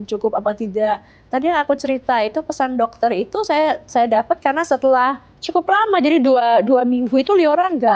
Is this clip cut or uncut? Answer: uncut